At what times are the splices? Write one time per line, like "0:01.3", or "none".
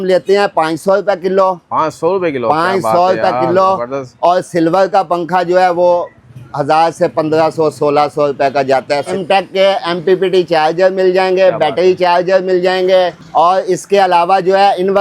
0:09.1
0:13.2